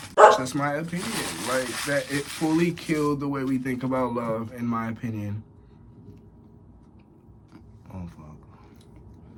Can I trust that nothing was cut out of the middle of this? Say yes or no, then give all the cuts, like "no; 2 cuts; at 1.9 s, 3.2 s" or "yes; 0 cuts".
yes; 0 cuts